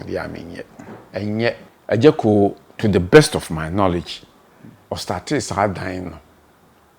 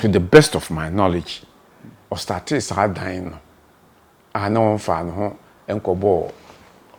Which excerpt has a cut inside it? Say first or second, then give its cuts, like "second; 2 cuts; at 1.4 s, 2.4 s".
first; 1 cut; at 1.7 s